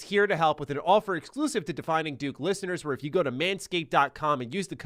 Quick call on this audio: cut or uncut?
uncut